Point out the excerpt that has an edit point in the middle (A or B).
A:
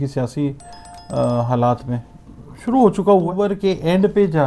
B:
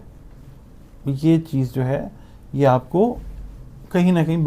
A